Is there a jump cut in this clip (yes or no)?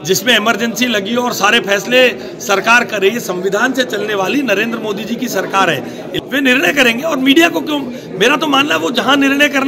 yes